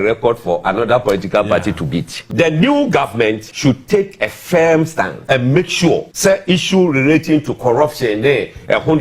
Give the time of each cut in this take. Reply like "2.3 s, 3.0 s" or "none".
2.2 s, 3.5 s, 5.2 s, 6.1 s